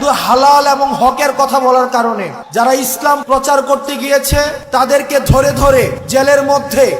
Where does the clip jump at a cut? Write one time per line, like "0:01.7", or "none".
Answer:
0:02.4
0:03.2
0:04.6
0:06.0

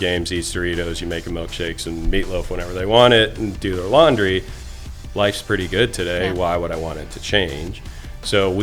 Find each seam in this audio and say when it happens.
none

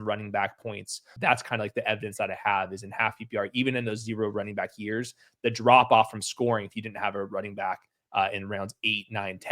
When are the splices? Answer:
0:01.1

